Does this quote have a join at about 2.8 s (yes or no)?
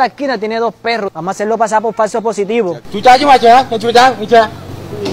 yes